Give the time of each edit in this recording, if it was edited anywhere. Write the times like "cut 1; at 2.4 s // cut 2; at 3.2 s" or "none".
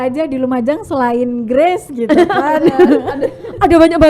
none

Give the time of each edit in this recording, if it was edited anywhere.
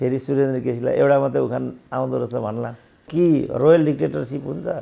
cut 1; at 3.1 s

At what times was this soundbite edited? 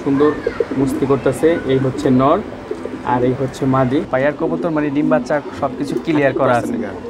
cut 1; at 4.1 s

